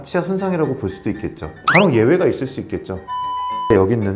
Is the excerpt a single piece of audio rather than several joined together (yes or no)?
no